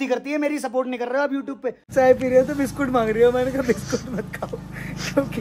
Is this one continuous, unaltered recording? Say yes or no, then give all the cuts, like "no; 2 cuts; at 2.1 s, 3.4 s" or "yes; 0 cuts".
no; 1 cut; at 1.9 s